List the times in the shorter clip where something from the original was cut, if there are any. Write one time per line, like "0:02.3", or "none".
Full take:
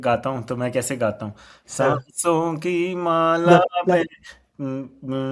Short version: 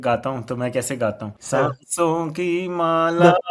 0:01.3

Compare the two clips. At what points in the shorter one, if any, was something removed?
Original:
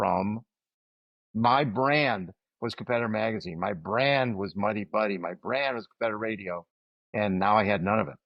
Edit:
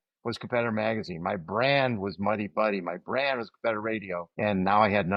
0:04.3

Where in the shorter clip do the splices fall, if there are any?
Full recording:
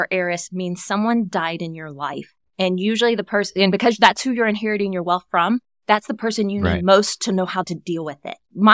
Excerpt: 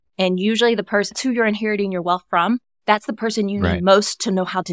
0:01.1

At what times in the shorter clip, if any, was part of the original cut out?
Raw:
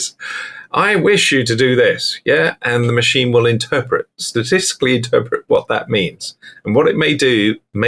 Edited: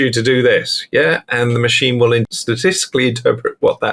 0:02.3

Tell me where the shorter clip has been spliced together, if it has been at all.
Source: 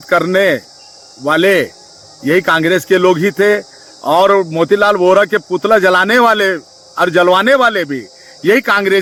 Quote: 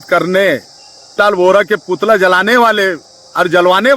0:01.2

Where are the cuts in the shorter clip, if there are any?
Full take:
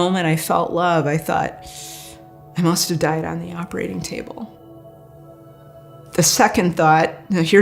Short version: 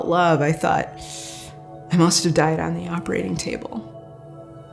0:03.8

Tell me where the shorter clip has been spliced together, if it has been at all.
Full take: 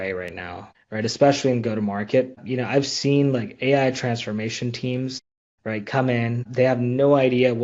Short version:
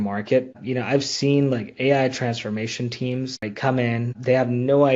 0:03.4

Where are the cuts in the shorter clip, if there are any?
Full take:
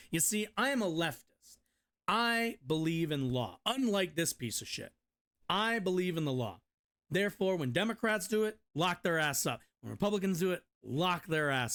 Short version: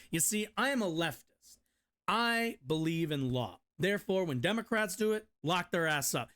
0:03.6

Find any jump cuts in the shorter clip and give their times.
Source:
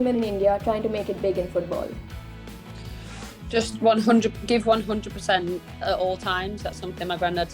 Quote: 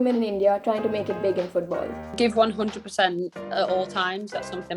0:02.1

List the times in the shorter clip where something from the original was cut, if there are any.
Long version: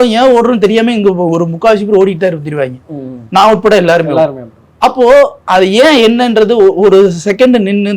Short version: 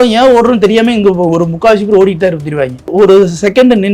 0:02.9

